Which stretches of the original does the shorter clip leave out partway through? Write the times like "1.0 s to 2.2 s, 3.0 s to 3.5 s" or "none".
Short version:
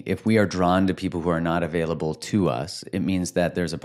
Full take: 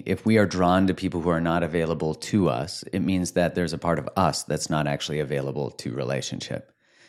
none